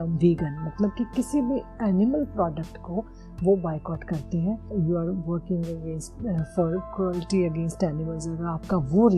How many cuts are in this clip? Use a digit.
1